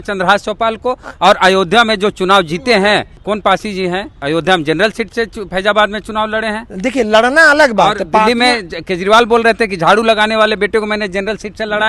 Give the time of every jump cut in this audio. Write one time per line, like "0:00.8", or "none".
0:03.1
0:04.1